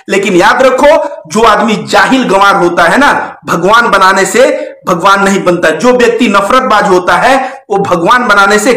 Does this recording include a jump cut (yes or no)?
no